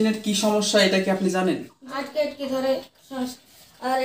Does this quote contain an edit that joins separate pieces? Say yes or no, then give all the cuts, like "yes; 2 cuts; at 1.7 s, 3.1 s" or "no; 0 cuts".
yes; 1 cut; at 1.8 s